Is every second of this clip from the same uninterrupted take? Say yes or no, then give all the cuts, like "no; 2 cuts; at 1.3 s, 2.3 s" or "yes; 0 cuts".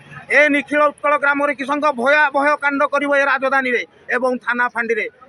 yes; 0 cuts